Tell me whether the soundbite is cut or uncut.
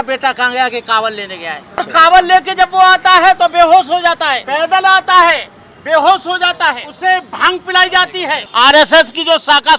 cut